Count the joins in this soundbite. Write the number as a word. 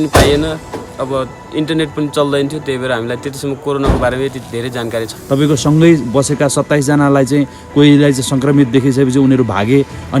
one